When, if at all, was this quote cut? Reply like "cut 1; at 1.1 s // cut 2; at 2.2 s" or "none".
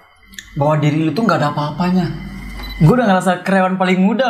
cut 1; at 2.6 s